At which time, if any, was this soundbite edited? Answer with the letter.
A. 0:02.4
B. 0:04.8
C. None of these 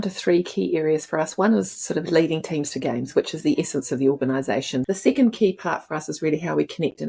B